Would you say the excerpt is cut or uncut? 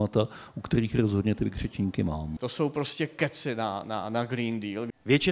uncut